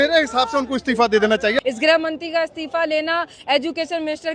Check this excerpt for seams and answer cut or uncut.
cut